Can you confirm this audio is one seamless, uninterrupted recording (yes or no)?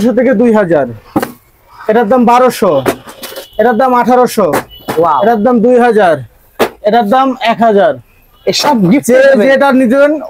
yes